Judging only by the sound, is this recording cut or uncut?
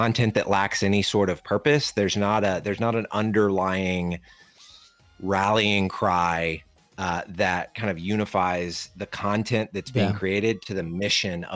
uncut